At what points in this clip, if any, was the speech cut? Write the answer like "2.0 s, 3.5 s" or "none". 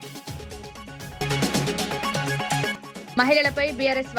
0.9 s